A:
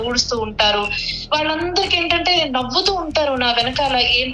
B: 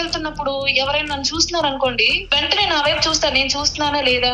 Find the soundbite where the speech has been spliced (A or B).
B